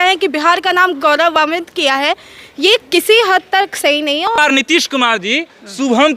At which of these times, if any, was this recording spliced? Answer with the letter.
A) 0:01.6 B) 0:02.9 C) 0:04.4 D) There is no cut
C